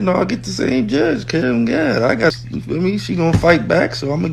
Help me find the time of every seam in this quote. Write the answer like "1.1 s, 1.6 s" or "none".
2.5 s